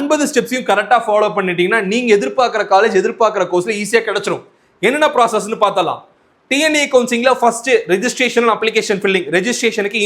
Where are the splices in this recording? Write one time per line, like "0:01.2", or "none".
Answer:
none